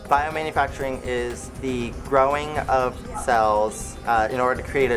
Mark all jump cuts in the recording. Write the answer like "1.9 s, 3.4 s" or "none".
2.0 s, 3.9 s